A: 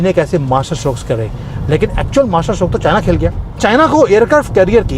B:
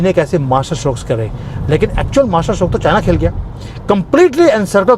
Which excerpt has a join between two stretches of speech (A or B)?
A